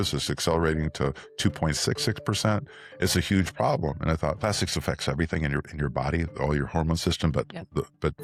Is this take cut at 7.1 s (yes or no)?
no